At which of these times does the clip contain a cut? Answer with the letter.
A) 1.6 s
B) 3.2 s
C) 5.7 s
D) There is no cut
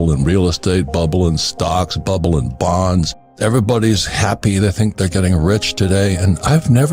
B